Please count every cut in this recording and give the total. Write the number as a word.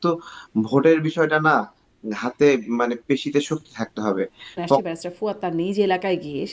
one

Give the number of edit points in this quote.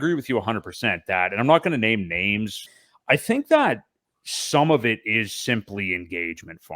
one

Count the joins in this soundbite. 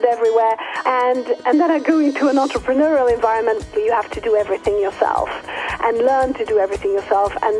two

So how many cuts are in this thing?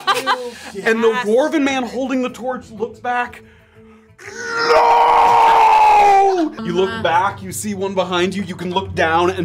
one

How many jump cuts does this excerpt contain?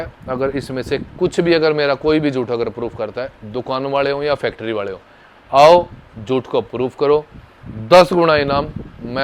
zero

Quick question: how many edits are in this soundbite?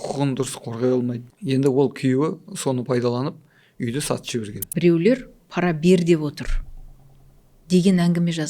two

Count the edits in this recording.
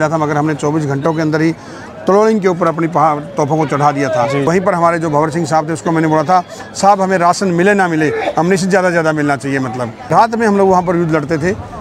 one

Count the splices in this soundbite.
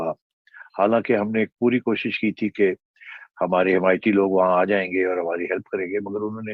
zero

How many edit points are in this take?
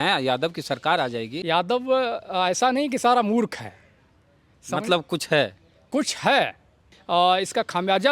two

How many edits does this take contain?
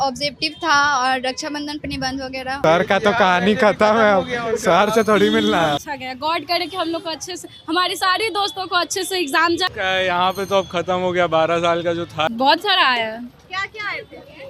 four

